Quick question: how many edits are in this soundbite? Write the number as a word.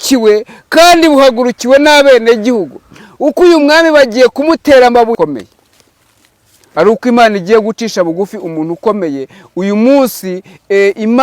one